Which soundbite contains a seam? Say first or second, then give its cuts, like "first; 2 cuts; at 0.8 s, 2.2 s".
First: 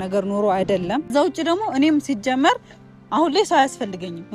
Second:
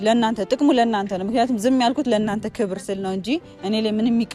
first; 1 cut; at 1.1 s